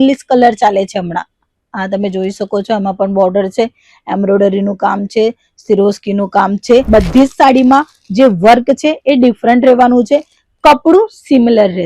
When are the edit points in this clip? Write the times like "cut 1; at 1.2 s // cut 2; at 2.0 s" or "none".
cut 1; at 6.9 s